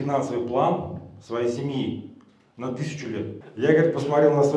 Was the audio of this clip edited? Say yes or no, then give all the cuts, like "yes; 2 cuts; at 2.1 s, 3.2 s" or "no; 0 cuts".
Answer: yes; 1 cut; at 3.4 s